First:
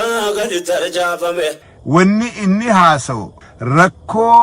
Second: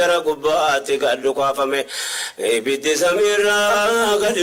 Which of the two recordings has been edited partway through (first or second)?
first